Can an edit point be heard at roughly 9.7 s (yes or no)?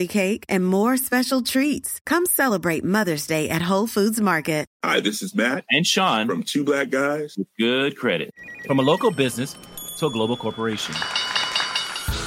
no